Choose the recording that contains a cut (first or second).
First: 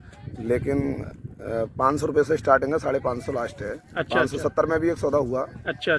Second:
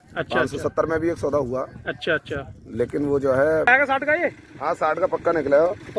second